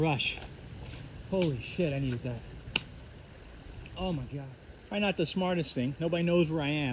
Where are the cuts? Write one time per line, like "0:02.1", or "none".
0:04.6

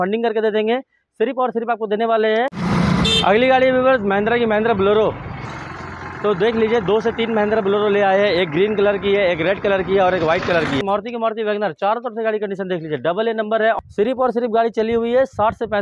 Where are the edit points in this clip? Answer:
0:02.6
0:05.5
0:10.8
0:13.8

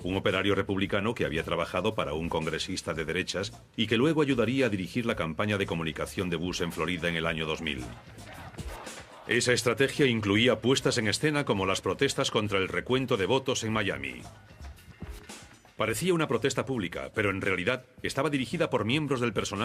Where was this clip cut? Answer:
0:02.2

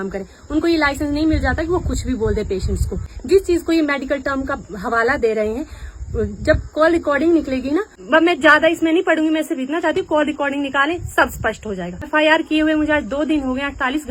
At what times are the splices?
0:03.1
0:07.9
0:12.0

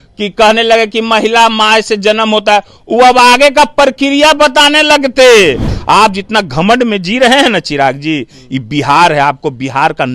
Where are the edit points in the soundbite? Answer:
0:05.7

